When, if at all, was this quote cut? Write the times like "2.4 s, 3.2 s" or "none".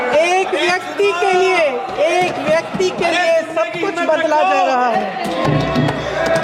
none